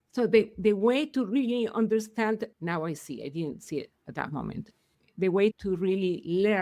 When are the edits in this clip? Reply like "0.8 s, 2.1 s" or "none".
2.5 s, 5.6 s

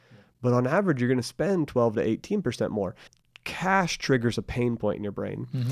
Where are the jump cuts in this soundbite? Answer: 3.1 s

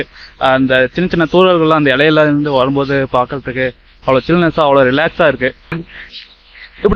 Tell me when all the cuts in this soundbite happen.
5.8 s

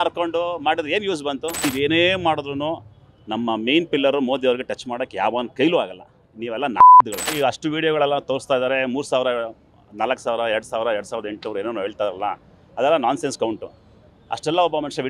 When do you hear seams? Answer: 1.6 s, 7.0 s

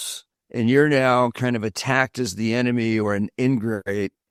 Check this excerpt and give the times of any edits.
none

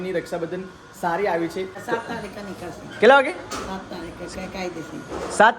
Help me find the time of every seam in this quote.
1.8 s

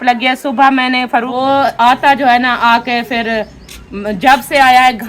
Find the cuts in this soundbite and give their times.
1.7 s

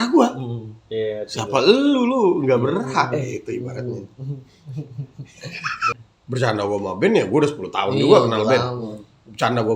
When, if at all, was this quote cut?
5.9 s

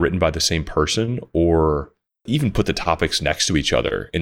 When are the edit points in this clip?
2.2 s

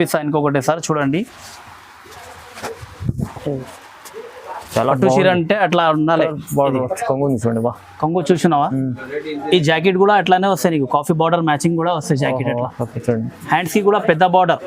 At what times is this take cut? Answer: 6.3 s

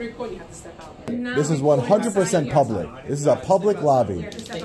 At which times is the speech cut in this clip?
1.1 s

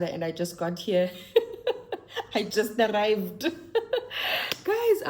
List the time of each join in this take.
none

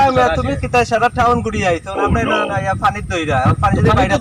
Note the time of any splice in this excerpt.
none

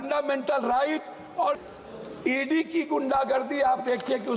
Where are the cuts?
1.6 s

